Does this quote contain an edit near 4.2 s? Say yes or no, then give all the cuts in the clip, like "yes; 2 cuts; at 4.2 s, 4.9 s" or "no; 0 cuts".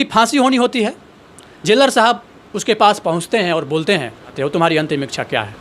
yes; 1 cut; at 4.2 s